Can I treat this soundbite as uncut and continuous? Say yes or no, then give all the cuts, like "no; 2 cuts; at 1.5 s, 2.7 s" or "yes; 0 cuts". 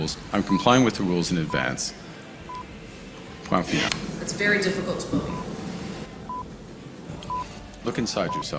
no; 2 cuts; at 3.9 s, 7.6 s